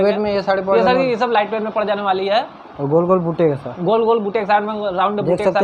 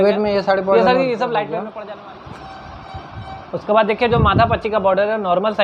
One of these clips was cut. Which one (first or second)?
second